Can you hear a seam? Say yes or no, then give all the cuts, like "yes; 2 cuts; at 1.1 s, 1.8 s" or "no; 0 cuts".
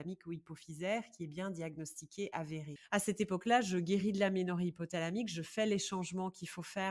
yes; 1 cut; at 2.7 s